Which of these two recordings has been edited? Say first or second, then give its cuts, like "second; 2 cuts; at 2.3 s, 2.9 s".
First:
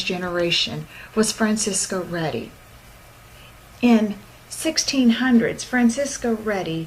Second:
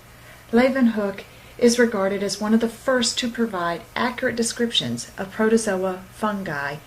second; 1 cut; at 4.7 s